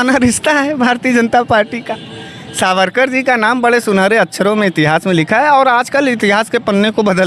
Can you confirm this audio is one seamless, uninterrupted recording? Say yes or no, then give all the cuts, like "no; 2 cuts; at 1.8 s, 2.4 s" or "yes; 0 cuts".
yes; 0 cuts